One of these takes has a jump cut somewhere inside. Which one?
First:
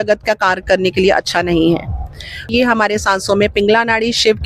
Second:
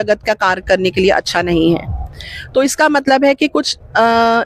first; 1 cut; at 2.5 s

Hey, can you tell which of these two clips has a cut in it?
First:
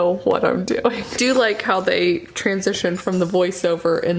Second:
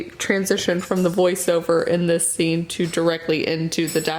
first; 1 cut; at 1.2 s

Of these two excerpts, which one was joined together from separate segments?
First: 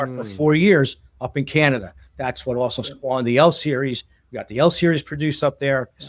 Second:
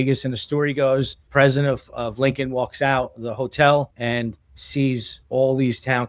second; 3 cuts; at 1.2 s, 3.9 s, 5.1 s

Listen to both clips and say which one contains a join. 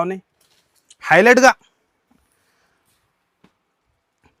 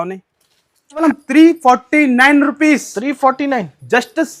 second; 1 cut; at 1.0 s

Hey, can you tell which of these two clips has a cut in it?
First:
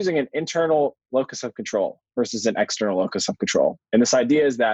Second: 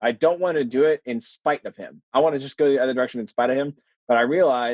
second; 1 cut; at 2.1 s

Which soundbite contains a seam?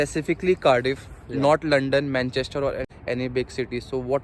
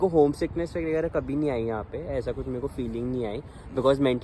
first; 1 cut; at 2.8 s

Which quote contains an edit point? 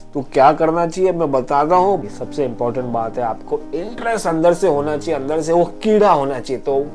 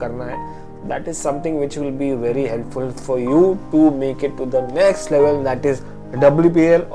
first; 1 cut; at 2.0 s

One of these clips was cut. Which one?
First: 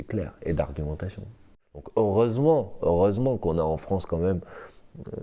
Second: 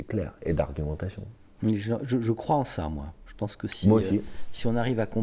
first; 1 cut; at 1.4 s

